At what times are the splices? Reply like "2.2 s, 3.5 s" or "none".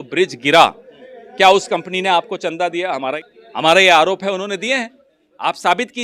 3.1 s